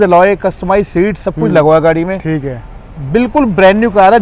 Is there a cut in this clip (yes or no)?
no